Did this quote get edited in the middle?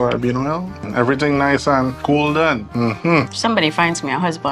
yes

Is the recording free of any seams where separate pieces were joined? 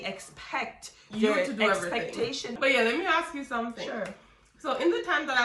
no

